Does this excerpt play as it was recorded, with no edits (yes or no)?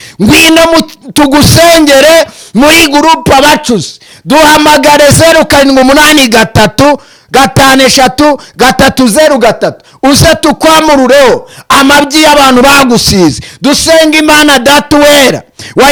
yes